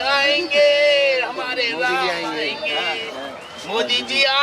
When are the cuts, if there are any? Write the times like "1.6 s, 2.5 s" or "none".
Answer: none

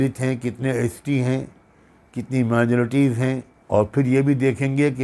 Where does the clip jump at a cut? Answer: 3.5 s

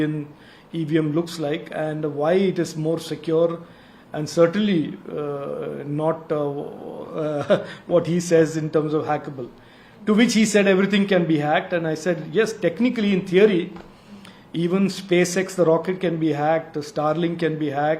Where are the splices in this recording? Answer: none

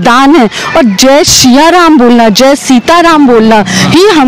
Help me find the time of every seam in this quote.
none

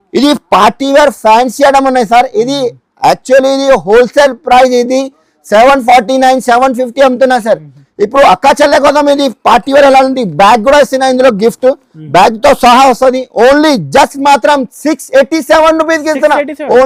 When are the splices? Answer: none

